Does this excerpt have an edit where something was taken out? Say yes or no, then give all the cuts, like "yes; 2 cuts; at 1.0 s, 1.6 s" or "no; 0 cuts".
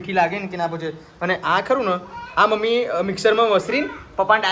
no; 0 cuts